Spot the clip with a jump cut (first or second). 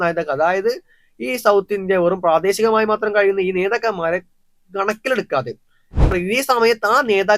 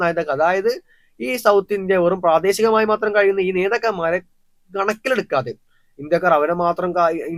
first